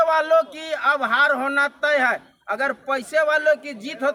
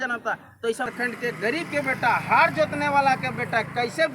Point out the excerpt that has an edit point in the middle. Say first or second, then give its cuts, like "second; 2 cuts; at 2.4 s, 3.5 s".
second; 1 cut; at 0.9 s